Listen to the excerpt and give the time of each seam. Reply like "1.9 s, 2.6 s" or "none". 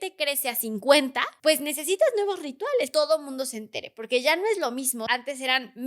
1.3 s, 2.9 s, 5.0 s